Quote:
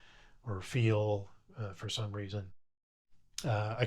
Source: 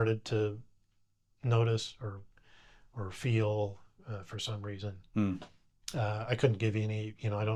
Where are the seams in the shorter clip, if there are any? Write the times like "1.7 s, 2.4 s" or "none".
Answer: none